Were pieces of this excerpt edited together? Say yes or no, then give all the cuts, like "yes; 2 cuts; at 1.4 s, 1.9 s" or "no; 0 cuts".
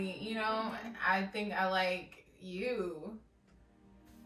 no; 0 cuts